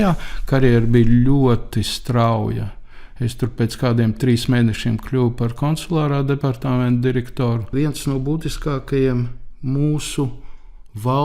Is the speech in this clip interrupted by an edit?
yes; 1 cut; at 7.7 s

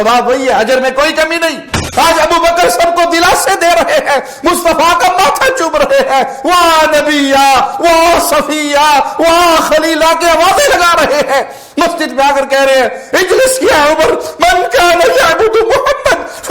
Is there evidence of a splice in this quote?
yes; 1 cut; at 1.8 s

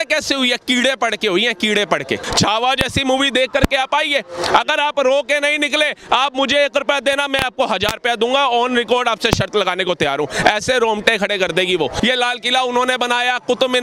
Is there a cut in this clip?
yes; 2 cuts; at 2.2 s, 11.9 s

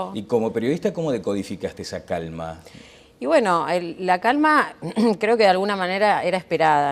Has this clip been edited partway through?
yes; 1 cut; at 3.0 s

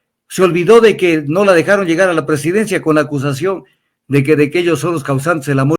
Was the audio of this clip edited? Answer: no; 0 cuts

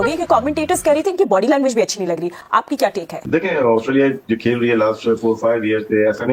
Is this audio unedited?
yes; 0 cuts

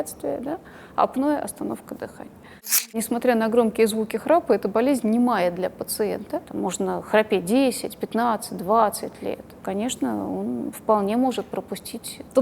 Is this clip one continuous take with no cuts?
no; 3 cuts; at 2.8 s, 6.4 s, 9.5 s

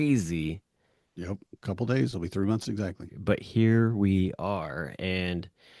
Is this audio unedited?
yes; 0 cuts

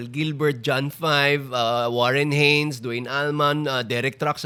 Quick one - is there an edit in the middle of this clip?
no; 0 cuts

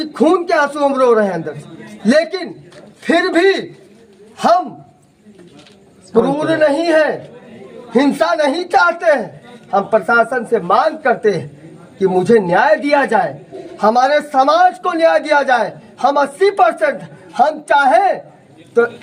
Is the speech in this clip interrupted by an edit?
no; 0 cuts

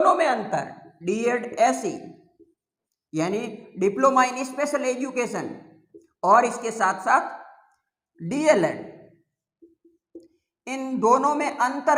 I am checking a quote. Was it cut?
no; 0 cuts

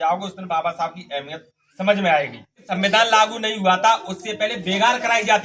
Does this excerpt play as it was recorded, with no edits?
no; 1 cut; at 2.7 s

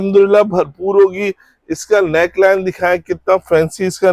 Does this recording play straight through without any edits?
yes; 0 cuts

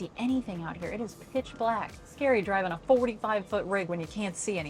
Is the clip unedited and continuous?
no; 1 cut; at 2.0 s

